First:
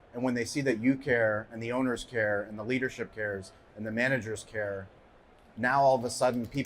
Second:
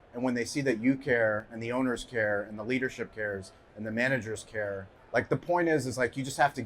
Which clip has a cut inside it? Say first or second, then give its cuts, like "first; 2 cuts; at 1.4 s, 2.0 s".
second; 1 cut; at 4.9 s